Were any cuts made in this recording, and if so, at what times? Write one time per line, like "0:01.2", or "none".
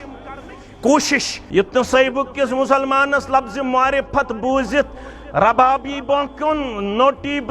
0:01.4